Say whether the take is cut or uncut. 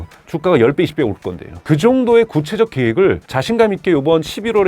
cut